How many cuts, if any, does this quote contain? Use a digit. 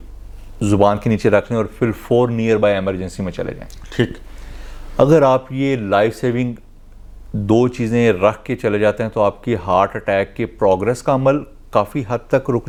0